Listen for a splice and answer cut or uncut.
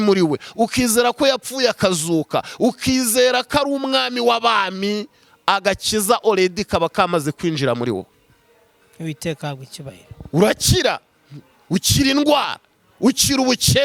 uncut